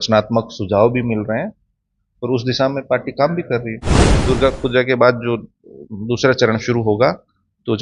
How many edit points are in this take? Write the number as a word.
one